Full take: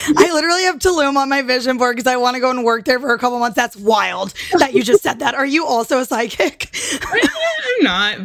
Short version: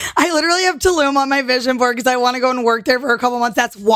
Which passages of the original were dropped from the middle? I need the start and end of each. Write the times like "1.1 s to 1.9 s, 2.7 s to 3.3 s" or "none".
none

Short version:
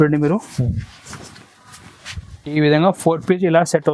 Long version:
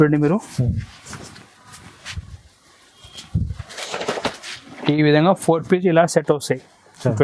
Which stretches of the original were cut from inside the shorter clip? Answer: 2.5 s to 4.9 s

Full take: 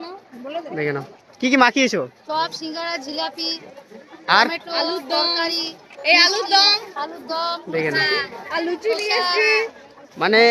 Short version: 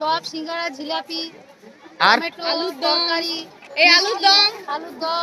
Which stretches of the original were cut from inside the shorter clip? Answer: none

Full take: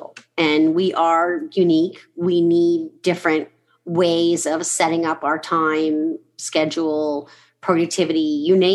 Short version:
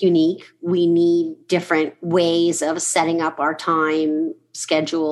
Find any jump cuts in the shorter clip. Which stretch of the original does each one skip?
3.5 s to 3.8 s

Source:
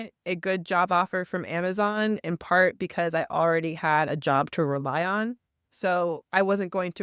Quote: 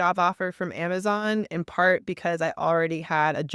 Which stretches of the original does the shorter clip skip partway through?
none

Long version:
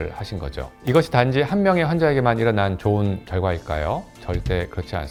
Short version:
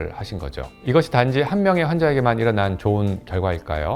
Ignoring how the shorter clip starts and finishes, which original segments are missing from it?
none

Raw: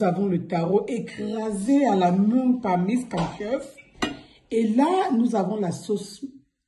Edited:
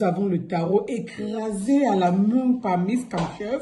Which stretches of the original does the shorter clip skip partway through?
none

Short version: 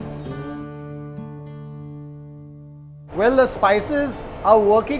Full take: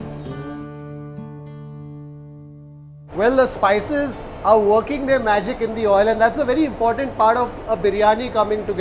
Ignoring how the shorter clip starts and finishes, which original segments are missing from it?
none

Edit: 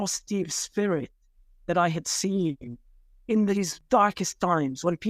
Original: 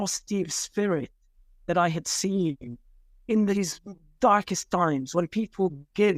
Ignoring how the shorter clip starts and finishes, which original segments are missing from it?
3.8 s to 4.1 s

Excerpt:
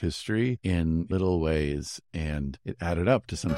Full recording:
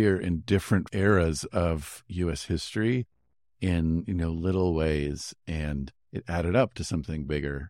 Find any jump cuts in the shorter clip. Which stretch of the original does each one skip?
3.5 s to 4.4 s, 6.0 s to 6.1 s

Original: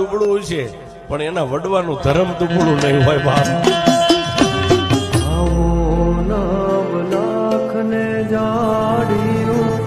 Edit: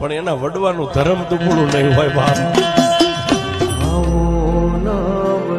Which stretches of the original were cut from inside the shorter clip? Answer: 4.9 s to 5.3 s

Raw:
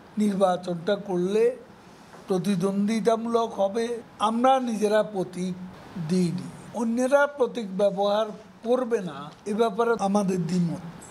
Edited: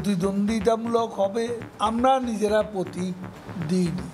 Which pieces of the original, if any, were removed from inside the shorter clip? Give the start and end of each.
none

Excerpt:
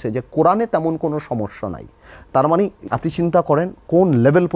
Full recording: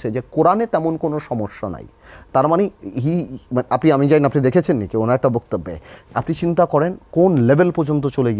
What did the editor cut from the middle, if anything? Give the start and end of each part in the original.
2.8 s to 6.0 s

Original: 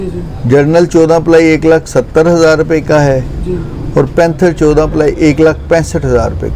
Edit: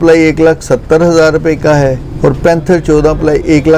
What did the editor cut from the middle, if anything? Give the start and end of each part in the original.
3.3 s to 3.8 s

